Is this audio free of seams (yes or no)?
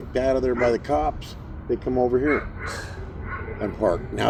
yes